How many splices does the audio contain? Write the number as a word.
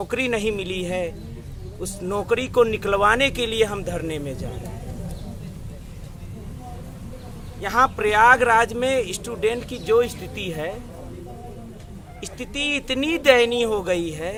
zero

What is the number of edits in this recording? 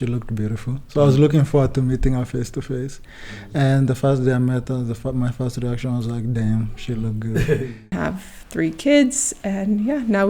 one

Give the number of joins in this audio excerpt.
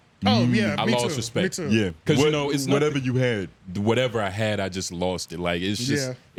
zero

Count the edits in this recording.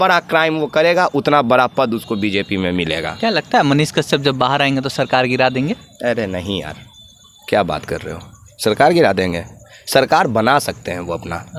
zero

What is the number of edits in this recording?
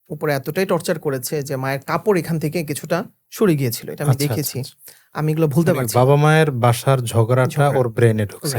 zero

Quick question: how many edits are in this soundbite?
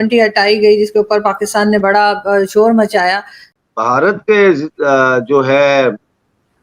one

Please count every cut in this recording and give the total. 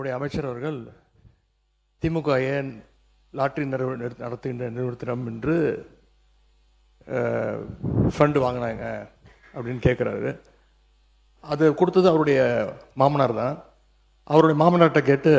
zero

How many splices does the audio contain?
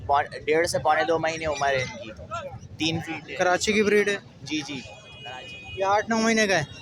one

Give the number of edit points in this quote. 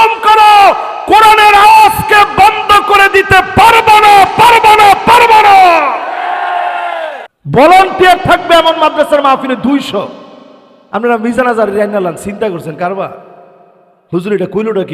one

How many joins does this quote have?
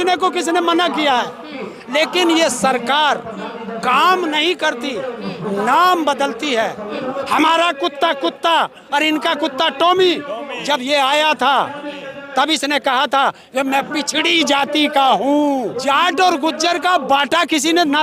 two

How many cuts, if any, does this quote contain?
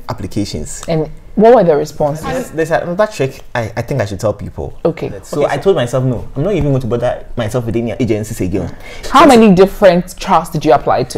three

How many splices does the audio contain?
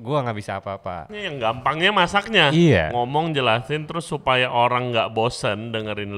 one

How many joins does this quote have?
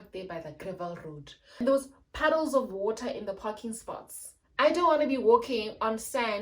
two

